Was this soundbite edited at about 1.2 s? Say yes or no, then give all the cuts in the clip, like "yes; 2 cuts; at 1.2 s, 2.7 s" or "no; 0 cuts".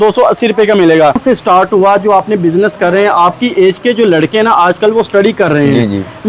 yes; 1 cut; at 1.2 s